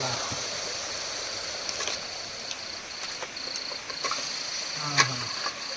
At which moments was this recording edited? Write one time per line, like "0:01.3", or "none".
0:04.1